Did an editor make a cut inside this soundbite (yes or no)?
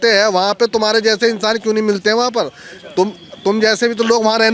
no